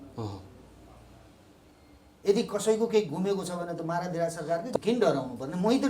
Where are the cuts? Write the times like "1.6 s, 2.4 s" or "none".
4.8 s